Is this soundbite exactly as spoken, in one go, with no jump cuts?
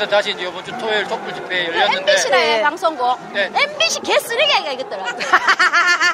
yes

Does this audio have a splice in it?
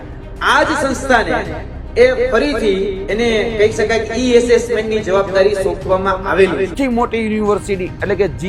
yes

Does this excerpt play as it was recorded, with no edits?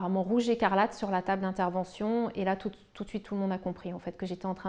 yes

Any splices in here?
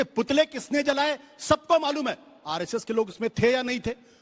no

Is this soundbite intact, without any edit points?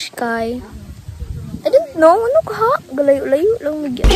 yes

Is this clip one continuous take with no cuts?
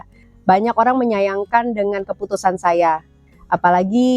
yes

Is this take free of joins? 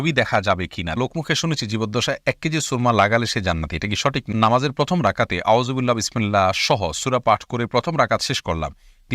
no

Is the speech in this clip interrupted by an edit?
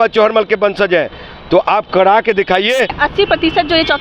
yes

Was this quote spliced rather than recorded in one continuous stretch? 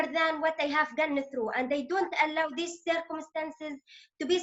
no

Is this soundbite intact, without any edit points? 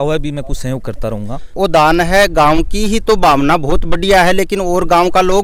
yes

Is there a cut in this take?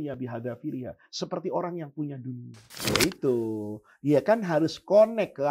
yes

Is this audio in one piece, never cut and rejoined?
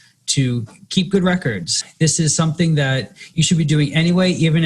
no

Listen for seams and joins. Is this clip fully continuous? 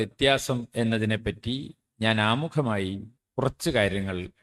yes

